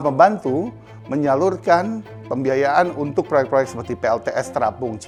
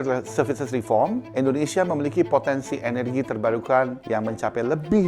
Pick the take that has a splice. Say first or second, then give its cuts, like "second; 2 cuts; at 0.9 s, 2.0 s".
second; 2 cuts; at 1.3 s, 4.0 s